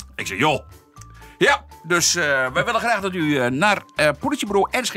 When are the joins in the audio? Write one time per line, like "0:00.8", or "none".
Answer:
none